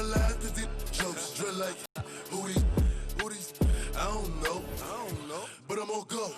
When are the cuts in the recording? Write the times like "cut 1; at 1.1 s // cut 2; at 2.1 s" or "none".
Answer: cut 1; at 3.0 s